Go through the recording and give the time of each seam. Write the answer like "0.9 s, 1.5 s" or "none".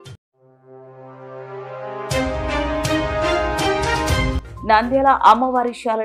none